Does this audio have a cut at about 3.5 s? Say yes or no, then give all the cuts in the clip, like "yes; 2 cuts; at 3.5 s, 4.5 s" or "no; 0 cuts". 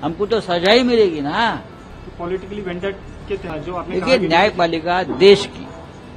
yes; 1 cut; at 3.5 s